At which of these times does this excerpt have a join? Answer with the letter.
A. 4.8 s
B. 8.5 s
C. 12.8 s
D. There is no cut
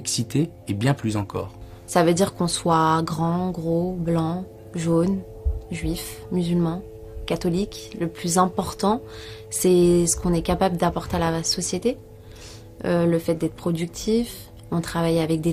A